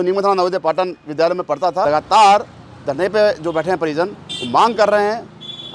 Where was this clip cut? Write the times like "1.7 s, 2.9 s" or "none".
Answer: 1.8 s

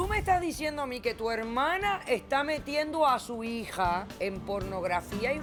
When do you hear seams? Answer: none

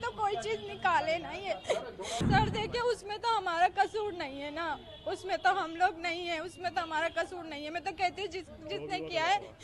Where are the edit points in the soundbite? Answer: 2.2 s

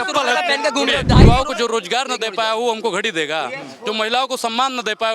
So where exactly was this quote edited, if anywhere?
1.3 s

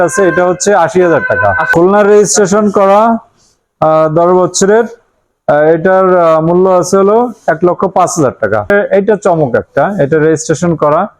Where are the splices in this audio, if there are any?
1.7 s, 8.7 s

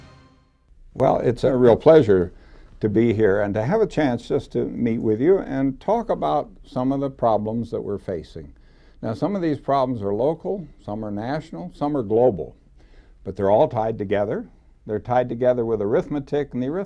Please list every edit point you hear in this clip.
none

